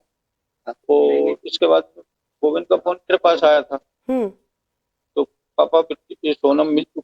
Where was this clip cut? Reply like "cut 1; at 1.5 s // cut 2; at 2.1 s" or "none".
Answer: cut 1; at 2.6 s